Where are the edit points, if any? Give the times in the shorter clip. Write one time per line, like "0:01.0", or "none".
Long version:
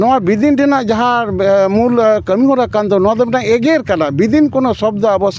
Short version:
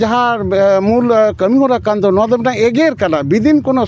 none